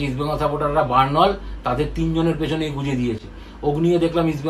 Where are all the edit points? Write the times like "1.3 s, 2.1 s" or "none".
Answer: none